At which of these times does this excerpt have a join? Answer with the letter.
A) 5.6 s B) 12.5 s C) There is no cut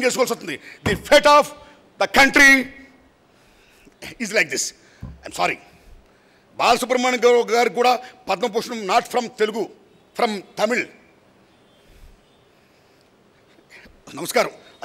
C